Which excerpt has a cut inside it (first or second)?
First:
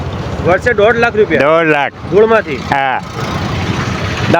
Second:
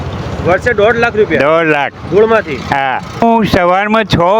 second